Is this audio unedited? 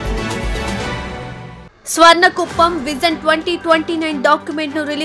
yes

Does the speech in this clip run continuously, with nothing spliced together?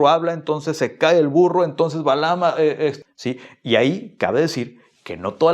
no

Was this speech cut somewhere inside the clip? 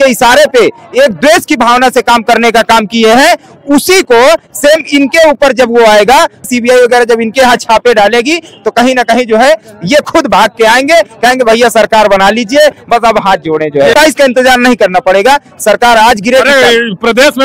yes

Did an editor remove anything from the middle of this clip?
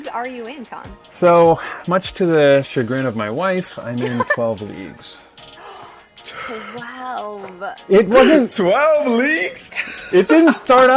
no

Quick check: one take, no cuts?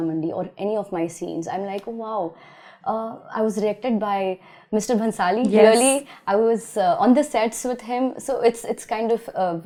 yes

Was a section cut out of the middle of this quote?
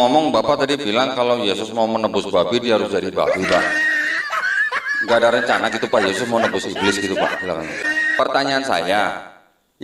yes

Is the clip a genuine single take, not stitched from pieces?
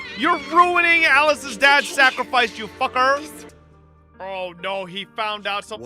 no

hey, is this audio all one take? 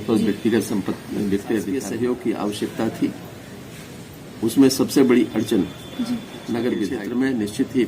no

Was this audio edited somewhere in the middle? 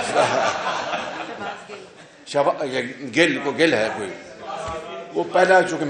no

